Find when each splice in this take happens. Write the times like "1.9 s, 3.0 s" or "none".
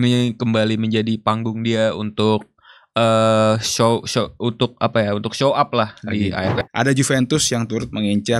6.6 s